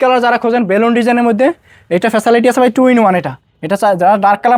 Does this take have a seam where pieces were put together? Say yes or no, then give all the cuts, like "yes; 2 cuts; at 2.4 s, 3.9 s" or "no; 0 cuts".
no; 0 cuts